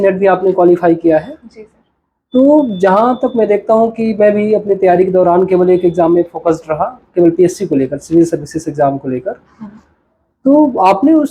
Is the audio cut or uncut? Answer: uncut